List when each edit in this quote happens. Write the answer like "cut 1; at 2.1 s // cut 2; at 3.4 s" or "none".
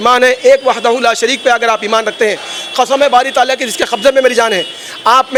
none